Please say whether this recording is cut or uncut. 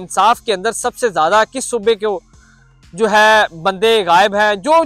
uncut